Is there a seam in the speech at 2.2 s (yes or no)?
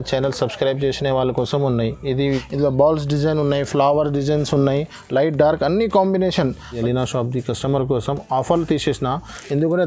yes